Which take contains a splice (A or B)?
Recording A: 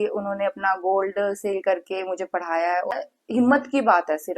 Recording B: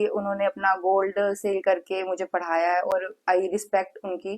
A